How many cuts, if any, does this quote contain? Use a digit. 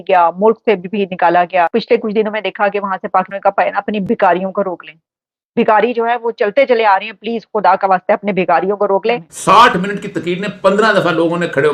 3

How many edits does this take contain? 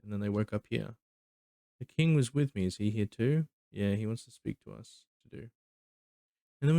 1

